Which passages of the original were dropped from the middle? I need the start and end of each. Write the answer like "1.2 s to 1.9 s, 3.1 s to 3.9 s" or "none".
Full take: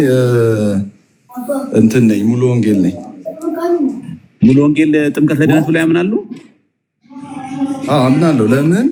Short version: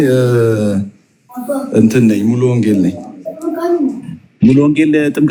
none